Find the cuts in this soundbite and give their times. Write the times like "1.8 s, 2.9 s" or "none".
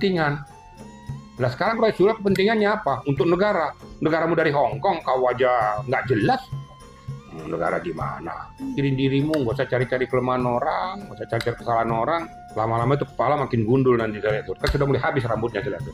8.7 s, 12.4 s

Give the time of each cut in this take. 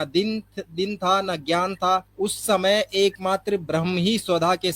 2.1 s

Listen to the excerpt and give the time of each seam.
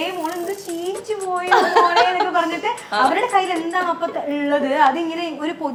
none

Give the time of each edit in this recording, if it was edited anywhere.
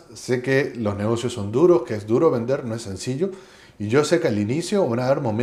none

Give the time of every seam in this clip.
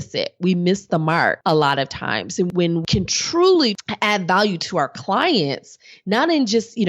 1.4 s, 2.5 s, 3.8 s

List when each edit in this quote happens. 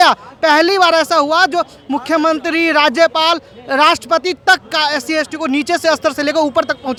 none

